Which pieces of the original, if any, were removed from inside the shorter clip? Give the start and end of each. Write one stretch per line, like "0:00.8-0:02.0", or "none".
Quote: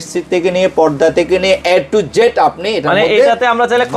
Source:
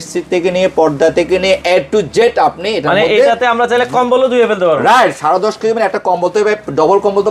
none